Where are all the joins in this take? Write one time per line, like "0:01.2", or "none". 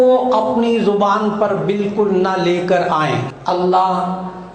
0:03.2